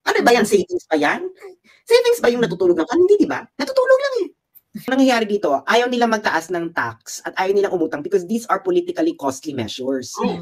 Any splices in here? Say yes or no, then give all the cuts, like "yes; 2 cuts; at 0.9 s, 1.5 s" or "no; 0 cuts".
yes; 1 cut; at 4.9 s